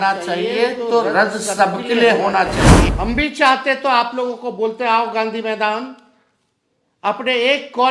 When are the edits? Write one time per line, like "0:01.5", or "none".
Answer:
0:02.9

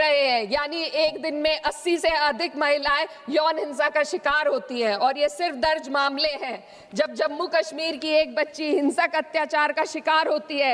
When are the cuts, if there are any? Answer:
none

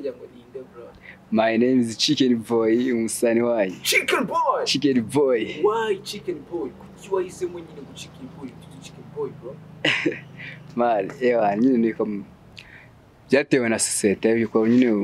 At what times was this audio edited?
none

